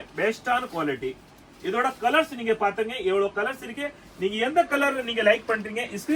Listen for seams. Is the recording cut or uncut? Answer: uncut